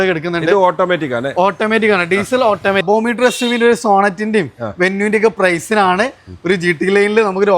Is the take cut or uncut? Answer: cut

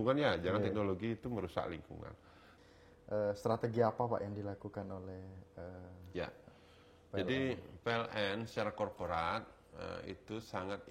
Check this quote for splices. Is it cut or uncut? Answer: cut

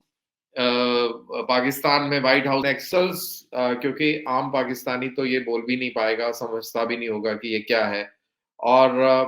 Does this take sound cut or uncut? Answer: cut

